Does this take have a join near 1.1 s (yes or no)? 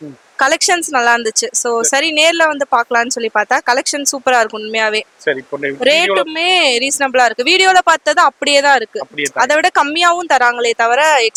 no